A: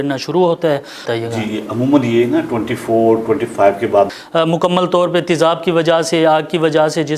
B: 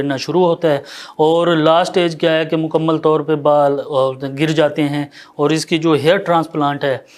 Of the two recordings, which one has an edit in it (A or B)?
A